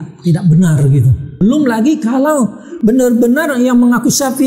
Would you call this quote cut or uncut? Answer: cut